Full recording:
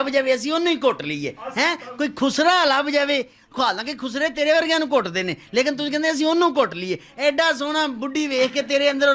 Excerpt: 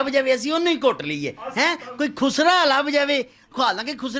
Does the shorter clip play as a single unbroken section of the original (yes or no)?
yes